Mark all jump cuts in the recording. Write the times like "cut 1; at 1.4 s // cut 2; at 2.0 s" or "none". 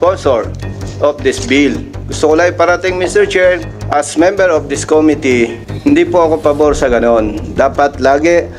cut 1; at 3.7 s // cut 2; at 5.7 s